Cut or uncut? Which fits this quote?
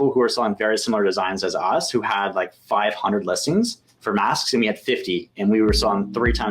uncut